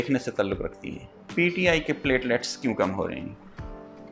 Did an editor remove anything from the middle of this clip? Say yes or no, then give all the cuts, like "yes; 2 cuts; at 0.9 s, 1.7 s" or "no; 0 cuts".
yes; 1 cut; at 1.3 s